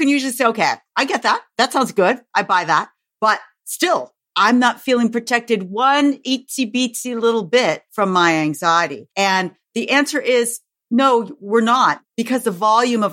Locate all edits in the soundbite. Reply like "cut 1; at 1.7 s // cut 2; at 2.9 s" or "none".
cut 1; at 7.9 s // cut 2; at 9.0 s // cut 3; at 12.1 s